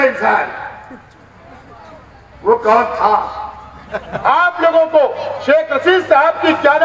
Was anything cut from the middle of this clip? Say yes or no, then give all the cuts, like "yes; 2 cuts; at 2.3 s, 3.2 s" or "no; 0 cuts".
yes; 1 cut; at 4.1 s